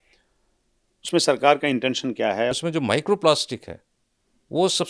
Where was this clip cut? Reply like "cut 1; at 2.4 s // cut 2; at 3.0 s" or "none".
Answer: cut 1; at 2.5 s